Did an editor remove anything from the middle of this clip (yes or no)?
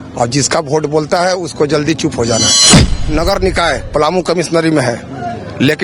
yes